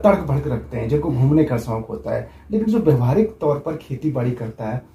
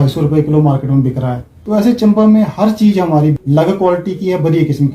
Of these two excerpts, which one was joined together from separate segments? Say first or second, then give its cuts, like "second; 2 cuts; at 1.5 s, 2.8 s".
second; 2 cuts; at 1.5 s, 3.4 s